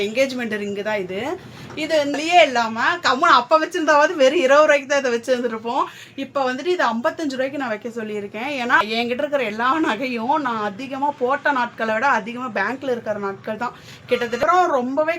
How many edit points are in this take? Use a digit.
3